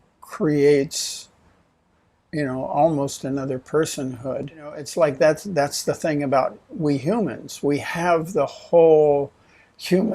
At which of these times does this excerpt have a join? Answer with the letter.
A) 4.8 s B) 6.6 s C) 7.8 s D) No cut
A